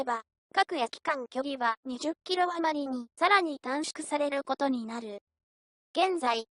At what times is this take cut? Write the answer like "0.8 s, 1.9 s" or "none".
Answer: 3.6 s